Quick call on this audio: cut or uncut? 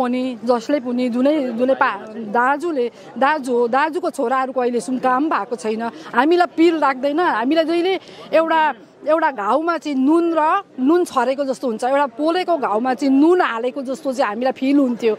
uncut